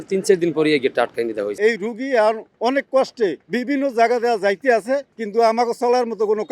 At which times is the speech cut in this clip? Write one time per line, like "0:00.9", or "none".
0:01.5
0:03.5
0:05.2